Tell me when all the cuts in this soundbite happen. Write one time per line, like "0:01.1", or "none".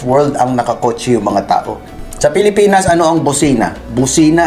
0:01.8